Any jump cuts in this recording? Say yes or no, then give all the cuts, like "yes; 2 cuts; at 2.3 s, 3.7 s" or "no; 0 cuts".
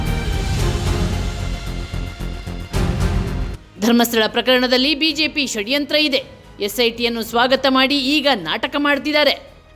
yes; 1 cut; at 3.6 s